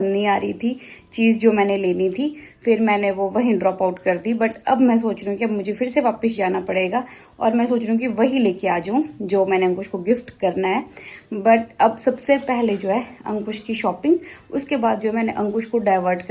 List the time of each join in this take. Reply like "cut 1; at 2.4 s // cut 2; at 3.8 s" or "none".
none